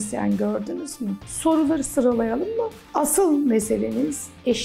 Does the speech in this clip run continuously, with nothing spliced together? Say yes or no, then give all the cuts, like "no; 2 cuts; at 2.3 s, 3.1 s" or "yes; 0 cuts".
no; 2 cuts; at 1.2 s, 2.8 s